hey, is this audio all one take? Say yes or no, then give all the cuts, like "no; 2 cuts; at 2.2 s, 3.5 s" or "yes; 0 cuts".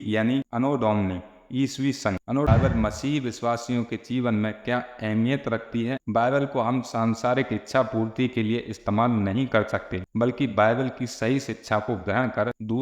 no; 1 cut; at 2.5 s